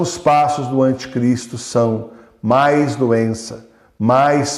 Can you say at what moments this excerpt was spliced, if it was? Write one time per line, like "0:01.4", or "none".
none